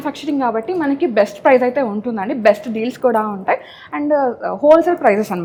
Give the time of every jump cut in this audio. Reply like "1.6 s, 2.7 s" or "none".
none